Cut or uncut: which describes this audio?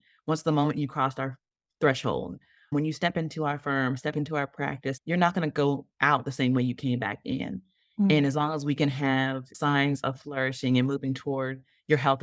cut